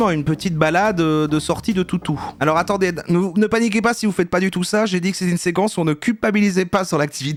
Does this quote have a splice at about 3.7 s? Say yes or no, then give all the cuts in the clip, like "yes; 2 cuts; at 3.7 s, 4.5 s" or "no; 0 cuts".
no; 0 cuts